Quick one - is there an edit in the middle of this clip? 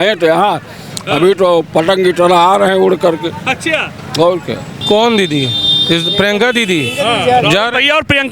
yes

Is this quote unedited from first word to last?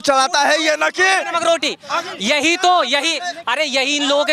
yes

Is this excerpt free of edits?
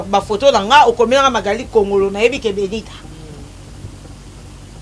yes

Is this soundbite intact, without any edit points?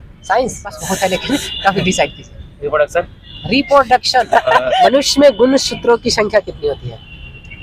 yes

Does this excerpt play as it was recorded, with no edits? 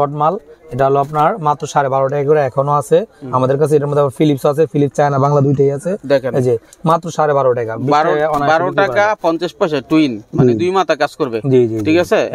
yes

